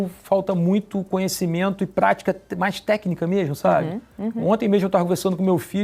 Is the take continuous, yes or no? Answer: yes